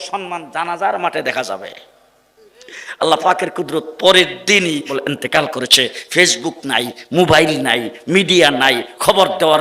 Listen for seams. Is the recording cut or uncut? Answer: cut